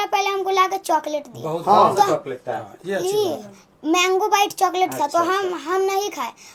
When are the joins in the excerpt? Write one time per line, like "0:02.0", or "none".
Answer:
none